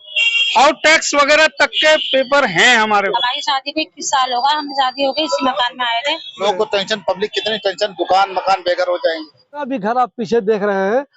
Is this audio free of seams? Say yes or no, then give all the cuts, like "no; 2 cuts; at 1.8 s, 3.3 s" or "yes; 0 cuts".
no; 3 cuts; at 3.1 s, 6.4 s, 9.7 s